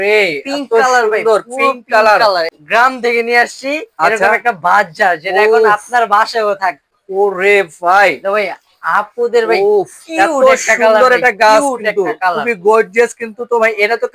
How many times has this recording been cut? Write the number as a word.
two